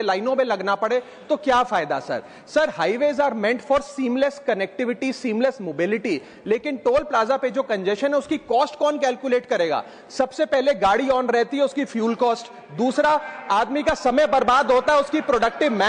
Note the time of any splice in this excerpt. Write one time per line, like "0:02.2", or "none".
none